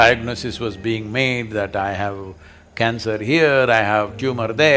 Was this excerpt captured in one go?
yes; 0 cuts

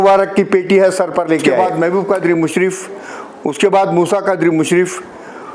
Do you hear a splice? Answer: yes; 1 cut; at 1.5 s

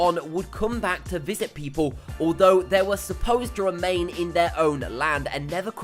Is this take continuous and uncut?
no; 1 cut; at 1.3 s

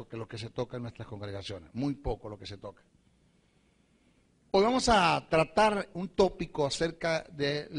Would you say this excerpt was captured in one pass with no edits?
no; 1 cut; at 2.7 s

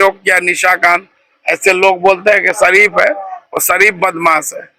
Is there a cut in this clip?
no; 0 cuts

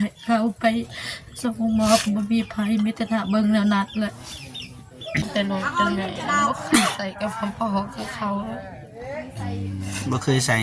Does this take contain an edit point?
yes; 1 cut; at 5.2 s

